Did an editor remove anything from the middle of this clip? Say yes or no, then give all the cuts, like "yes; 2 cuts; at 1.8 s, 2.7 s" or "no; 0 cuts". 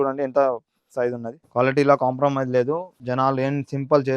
yes; 2 cuts; at 1.3 s, 3.0 s